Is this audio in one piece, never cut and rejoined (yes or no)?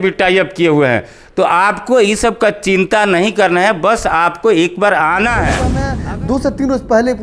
no